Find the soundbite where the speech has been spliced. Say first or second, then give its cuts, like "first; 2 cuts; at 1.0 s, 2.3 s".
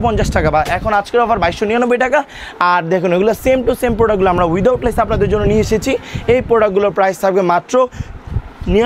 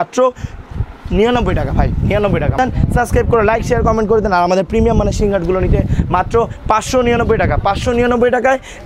second; 1 cut; at 2.6 s